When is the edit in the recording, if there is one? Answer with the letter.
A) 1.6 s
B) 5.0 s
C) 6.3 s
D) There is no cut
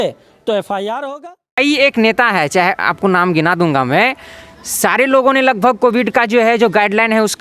A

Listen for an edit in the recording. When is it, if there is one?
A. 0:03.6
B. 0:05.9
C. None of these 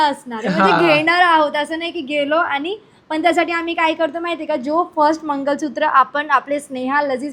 C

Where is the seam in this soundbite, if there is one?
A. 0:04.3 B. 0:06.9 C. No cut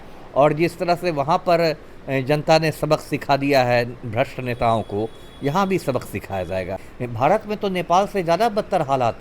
B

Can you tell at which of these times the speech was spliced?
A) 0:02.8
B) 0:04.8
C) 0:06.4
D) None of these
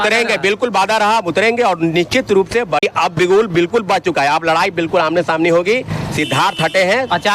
A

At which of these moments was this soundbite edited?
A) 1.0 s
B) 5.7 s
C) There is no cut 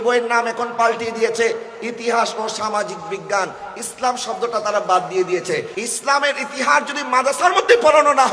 B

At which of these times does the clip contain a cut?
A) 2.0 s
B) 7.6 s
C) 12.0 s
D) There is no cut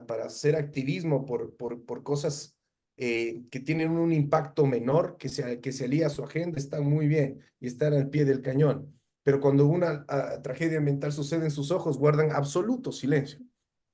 D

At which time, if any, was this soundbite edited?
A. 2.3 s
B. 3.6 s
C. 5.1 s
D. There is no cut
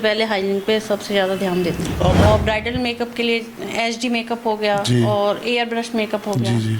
A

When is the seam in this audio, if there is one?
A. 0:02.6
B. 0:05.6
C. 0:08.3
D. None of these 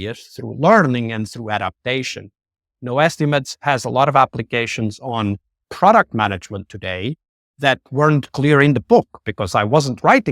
B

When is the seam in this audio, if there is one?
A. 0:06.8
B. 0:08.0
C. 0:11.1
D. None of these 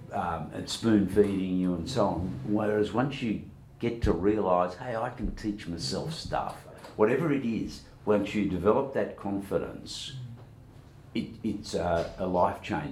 A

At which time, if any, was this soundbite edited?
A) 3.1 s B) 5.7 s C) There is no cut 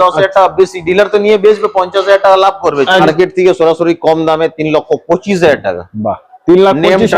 A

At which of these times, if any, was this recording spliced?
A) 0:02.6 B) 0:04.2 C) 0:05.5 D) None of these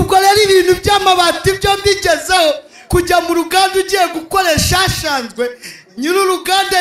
D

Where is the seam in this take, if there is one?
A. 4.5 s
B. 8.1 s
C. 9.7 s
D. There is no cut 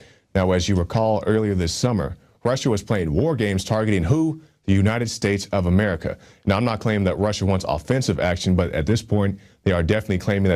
B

